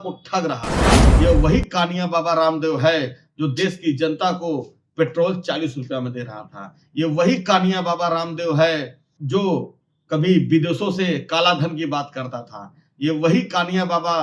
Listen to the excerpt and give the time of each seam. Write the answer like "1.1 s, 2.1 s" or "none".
1.0 s